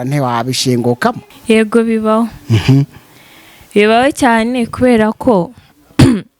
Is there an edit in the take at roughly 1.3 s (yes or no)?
yes